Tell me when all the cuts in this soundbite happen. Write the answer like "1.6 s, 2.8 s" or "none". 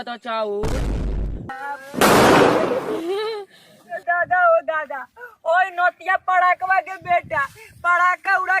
1.5 s